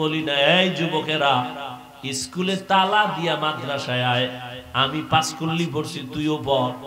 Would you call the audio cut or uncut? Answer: uncut